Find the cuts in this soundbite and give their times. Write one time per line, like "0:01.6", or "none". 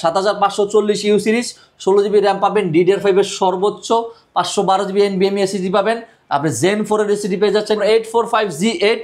0:07.8